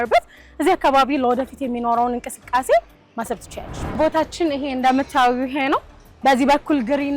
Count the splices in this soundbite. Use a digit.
1